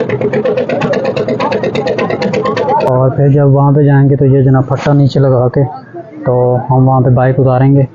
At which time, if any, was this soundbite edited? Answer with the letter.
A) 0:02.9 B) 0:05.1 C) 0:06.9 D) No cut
A